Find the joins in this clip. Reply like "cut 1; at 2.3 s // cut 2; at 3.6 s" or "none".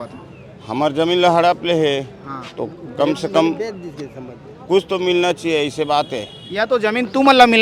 none

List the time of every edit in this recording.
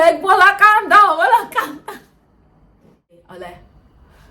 cut 1; at 3.2 s

